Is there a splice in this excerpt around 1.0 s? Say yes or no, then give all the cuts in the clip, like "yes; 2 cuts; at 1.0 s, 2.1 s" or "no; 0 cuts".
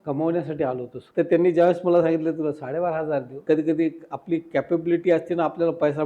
yes; 2 cuts; at 1.0 s, 3.4 s